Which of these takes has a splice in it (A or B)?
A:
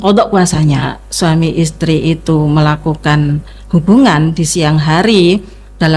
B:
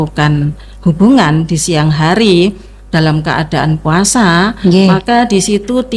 A